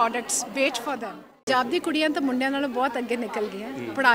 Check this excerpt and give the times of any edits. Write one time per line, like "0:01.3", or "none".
0:01.5